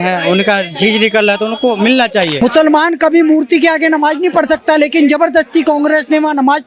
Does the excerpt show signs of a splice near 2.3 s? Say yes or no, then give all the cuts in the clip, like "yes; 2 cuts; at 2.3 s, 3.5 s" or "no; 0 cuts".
yes; 1 cut; at 2.3 s